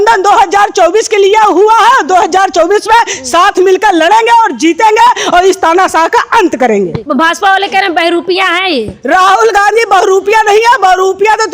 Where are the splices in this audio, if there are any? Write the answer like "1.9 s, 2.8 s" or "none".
7.0 s